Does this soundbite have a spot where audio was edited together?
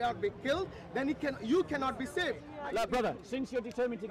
yes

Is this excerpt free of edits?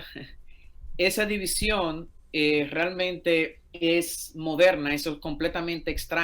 no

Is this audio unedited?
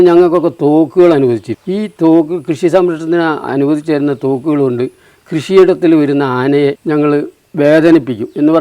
no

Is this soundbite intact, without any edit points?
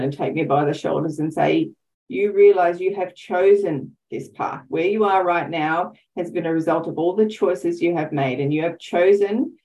yes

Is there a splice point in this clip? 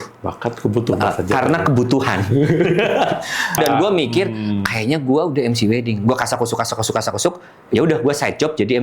yes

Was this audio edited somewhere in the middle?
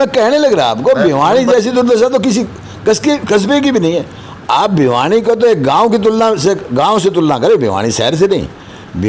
no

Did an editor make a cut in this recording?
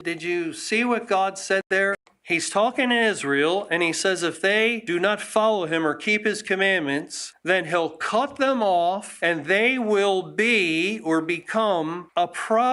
yes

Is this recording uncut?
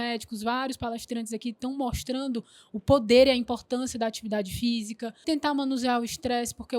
no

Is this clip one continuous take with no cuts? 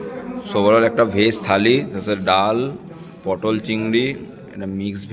yes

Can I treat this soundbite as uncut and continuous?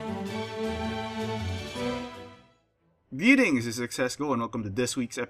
yes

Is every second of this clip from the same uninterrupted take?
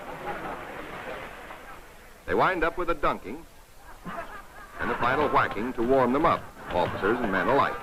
yes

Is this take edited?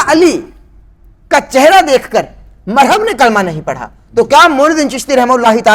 no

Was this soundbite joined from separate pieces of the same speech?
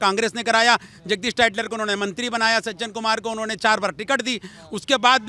no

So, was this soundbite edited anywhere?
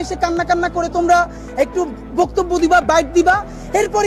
no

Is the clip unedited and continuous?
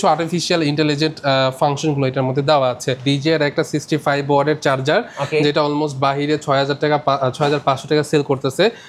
no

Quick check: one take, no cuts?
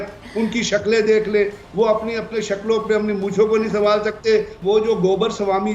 no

